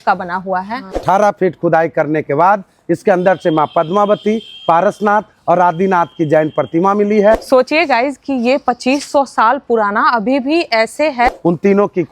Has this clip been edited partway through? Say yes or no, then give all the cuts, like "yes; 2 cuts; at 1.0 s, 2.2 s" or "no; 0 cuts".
yes; 3 cuts; at 1.0 s, 7.4 s, 11.4 s